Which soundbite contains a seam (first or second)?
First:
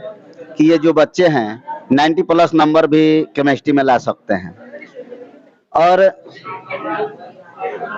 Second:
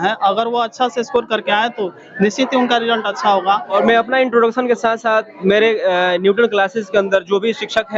second